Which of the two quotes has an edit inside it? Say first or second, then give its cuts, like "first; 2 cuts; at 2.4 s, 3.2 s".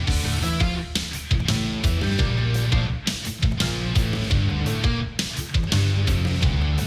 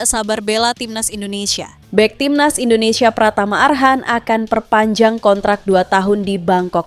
second; 1 cut; at 1.8 s